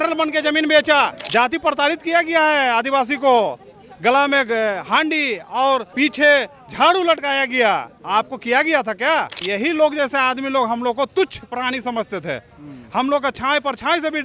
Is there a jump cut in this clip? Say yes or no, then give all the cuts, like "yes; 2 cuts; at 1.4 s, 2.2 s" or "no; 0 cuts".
yes; 3 cuts; at 1.2 s, 5.9 s, 9.5 s